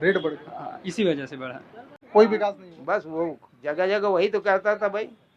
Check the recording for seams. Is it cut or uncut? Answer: cut